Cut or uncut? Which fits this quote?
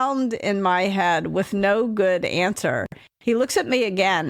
uncut